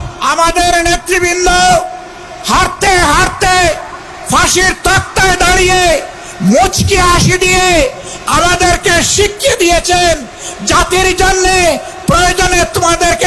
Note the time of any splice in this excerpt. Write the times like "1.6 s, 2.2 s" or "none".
none